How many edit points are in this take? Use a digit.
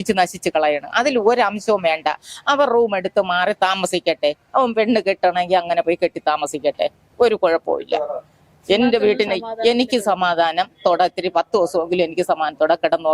0